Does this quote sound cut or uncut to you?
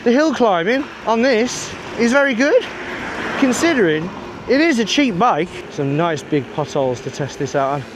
cut